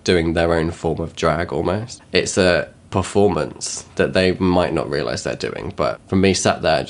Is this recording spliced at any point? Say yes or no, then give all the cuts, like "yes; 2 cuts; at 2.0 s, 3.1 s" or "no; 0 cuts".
yes; 3 cuts; at 1.9 s, 2.8 s, 6.0 s